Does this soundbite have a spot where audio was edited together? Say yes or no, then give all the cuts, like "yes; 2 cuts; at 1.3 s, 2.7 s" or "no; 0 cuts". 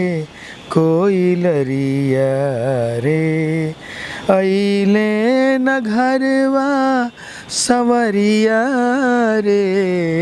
no; 0 cuts